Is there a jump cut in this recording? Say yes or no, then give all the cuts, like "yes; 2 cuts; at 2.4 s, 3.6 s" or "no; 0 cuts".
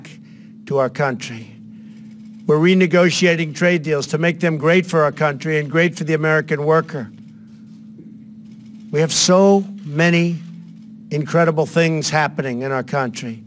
yes; 1 cut; at 12.5 s